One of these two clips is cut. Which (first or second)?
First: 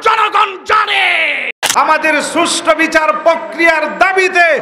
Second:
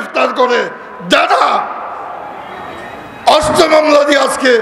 first